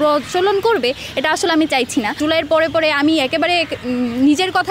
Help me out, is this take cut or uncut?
cut